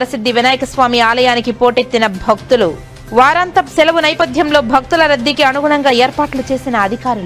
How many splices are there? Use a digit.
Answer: 0